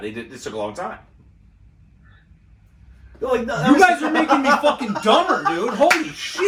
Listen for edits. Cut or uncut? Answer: uncut